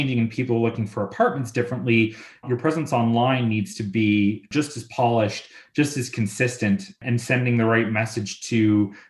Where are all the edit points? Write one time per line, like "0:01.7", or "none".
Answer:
0:02.4
0:04.4
0:07.0

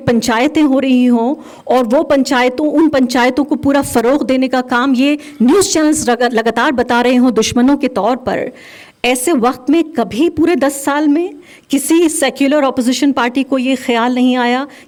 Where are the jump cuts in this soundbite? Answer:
none

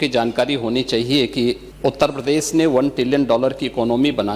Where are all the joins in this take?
0:01.7

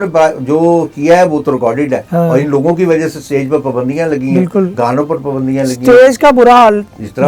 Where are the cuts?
0:02.0

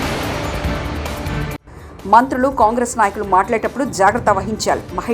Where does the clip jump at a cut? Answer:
none

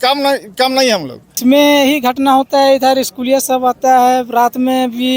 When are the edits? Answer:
0:01.2

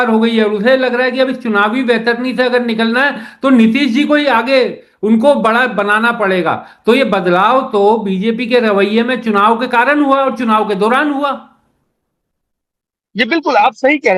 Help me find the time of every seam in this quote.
none

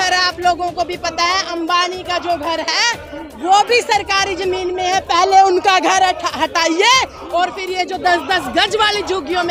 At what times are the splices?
none

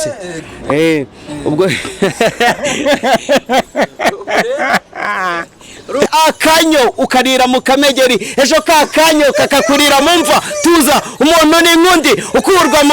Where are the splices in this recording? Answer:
0:06.1

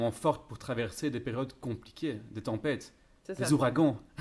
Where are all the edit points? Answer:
none

